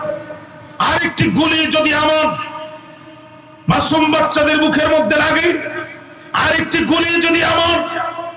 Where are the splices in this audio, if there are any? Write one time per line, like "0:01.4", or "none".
none